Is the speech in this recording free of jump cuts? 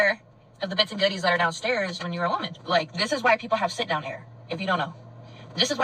no; 1 cut; at 2.5 s

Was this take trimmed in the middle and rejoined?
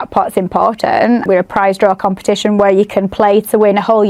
yes; 1 cut; at 1.2 s

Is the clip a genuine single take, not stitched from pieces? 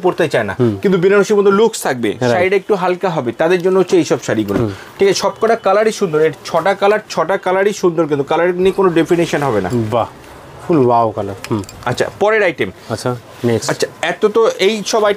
yes; 0 cuts

